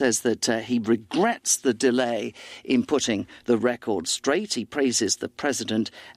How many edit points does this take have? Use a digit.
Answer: 0